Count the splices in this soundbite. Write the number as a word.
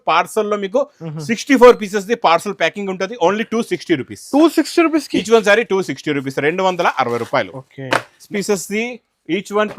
one